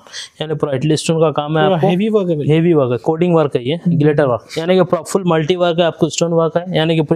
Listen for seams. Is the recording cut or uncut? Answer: cut